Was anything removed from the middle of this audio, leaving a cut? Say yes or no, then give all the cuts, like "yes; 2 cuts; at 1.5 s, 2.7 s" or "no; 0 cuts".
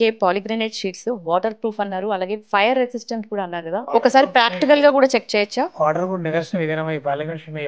yes; 1 cut; at 3.9 s